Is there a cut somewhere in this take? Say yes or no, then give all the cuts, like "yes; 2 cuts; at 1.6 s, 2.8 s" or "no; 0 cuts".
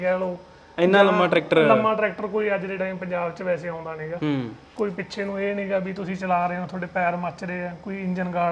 no; 0 cuts